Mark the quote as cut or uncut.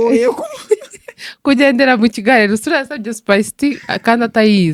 uncut